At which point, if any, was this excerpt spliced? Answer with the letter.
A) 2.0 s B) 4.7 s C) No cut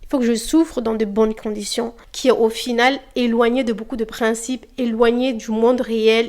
A